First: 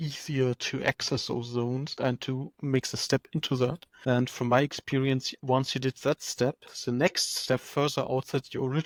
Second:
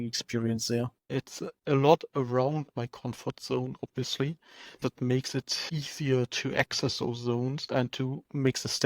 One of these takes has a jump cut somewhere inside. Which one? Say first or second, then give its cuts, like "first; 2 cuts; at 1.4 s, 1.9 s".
second; 2 cuts; at 1.0 s, 4.8 s